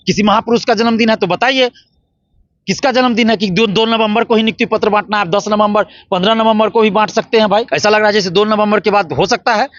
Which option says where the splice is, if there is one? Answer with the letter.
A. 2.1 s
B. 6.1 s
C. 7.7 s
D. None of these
C